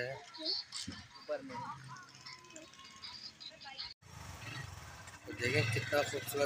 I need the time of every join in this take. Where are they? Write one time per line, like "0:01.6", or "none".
0:04.0